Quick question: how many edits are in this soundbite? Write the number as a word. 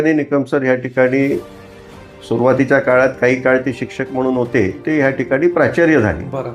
one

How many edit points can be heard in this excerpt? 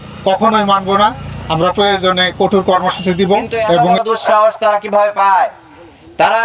one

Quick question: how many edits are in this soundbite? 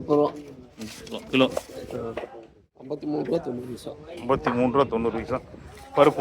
one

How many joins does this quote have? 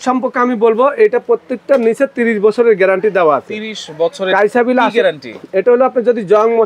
zero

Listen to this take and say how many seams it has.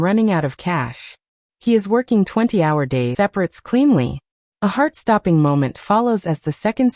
one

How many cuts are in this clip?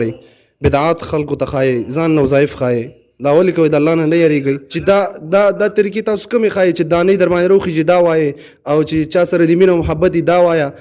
one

